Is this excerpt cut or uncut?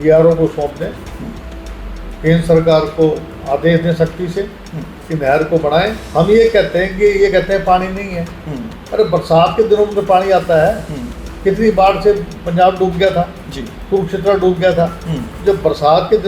cut